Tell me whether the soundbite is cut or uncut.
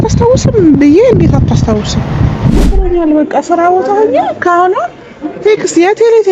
cut